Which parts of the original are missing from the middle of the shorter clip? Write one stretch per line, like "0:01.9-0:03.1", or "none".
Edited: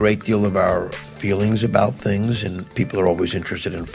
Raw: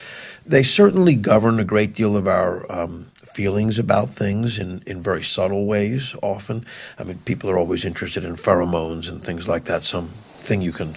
0:02.7-0:03.2
0:04.7-0:07.1